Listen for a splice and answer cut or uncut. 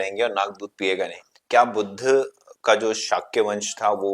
cut